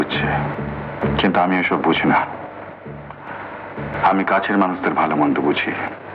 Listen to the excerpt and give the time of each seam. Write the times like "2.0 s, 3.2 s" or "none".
none